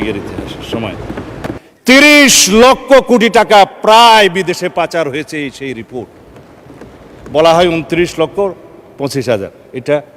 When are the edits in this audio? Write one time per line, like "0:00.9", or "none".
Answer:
0:01.5